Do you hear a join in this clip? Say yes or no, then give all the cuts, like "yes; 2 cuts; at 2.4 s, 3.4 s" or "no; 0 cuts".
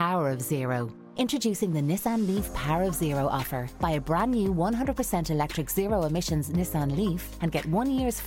no; 0 cuts